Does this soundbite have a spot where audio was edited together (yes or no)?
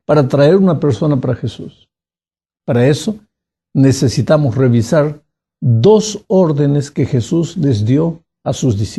yes